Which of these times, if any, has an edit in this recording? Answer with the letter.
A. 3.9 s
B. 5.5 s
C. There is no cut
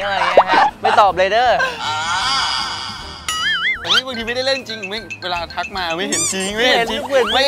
A